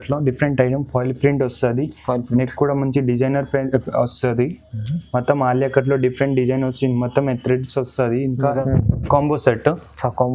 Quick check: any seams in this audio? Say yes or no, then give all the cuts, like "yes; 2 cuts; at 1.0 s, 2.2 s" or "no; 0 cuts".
yes; 1 cut; at 8.6 s